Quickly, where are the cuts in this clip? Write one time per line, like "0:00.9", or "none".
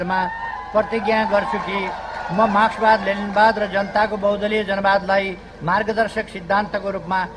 none